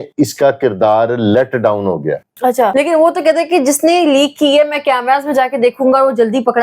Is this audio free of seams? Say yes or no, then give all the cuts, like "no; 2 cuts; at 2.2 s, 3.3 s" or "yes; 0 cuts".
no; 1 cut; at 2.7 s